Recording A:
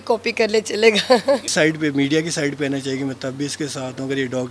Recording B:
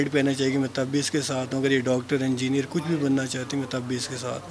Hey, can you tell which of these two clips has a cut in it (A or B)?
A